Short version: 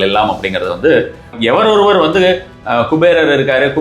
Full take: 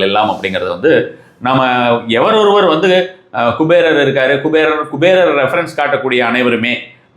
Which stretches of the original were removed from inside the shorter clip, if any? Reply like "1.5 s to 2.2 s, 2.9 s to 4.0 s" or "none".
1.4 s to 2.0 s

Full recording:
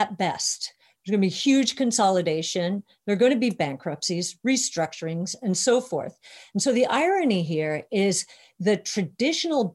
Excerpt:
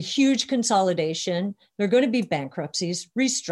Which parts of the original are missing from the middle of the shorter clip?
none

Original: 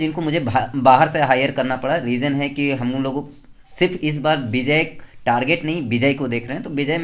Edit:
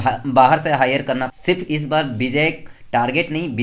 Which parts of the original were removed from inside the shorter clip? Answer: 1.8 s to 3.6 s

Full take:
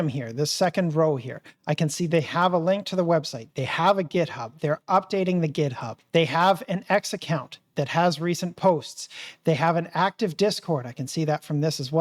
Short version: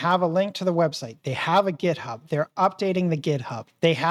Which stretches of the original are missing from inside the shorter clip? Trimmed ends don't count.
none

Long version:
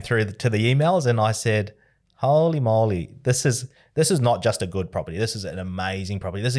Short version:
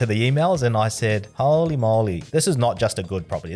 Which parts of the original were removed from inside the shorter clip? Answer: 1.7 s to 2.1 s, 3.0 s to 3.8 s

